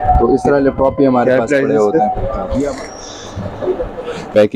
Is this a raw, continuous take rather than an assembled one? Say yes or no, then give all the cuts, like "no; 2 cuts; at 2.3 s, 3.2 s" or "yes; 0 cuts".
no; 1 cut; at 2.7 s